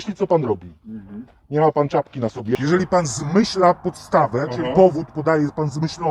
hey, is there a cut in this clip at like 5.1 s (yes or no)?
no